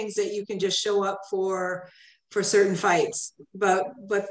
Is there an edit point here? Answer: no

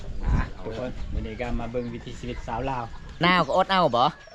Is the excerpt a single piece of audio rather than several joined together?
no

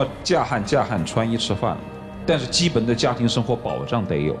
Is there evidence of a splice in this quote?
no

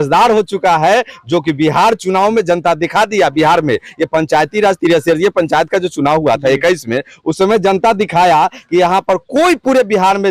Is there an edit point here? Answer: no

